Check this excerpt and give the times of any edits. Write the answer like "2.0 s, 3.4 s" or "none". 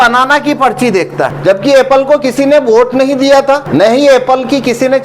1.3 s, 3.6 s